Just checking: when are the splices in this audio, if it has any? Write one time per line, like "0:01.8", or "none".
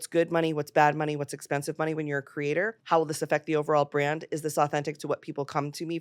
0:02.8